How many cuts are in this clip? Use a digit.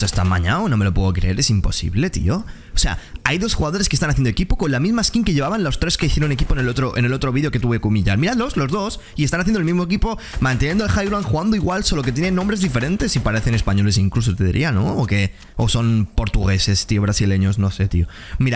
0